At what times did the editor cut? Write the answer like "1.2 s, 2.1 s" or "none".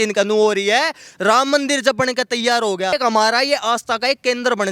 2.9 s